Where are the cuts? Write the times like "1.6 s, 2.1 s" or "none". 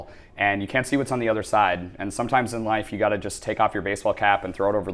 none